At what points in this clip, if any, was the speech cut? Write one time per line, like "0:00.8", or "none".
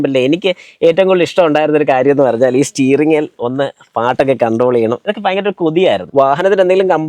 0:06.0